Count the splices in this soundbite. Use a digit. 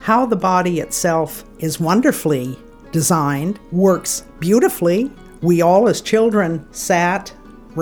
3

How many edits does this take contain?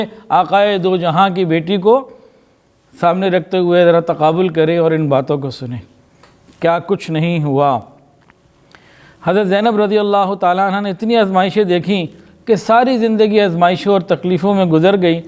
0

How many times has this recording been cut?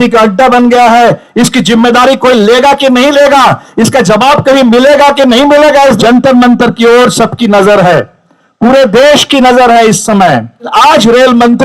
2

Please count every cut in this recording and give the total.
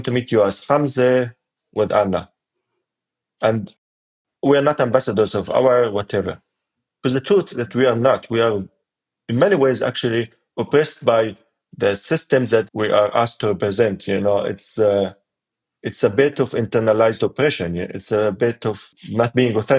3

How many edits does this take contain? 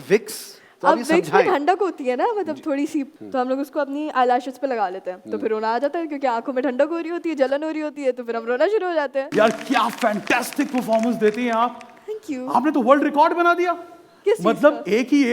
2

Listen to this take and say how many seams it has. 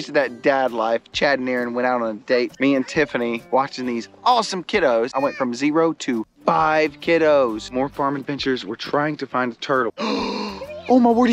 5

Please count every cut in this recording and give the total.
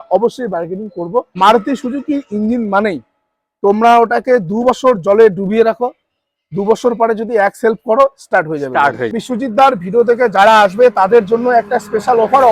2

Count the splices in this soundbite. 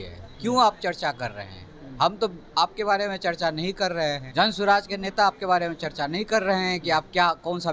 1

